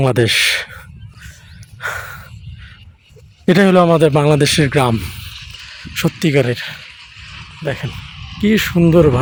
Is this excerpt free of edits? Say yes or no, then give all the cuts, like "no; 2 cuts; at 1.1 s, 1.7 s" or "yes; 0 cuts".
yes; 0 cuts